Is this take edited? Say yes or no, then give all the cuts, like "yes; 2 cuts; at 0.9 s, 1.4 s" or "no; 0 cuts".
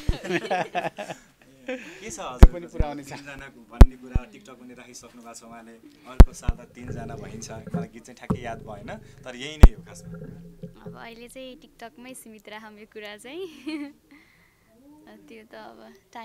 no; 0 cuts